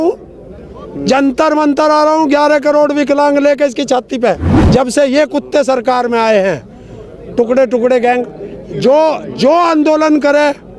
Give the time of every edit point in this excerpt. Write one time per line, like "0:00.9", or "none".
0:04.5